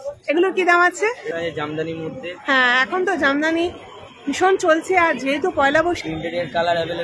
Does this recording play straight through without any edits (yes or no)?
no